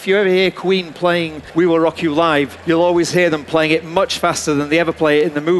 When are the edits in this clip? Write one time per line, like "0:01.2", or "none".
0:01.4
0:02.6